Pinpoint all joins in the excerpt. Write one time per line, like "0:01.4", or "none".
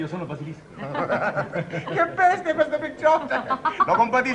none